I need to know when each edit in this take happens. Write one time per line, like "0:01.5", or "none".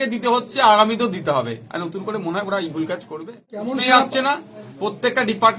0:03.6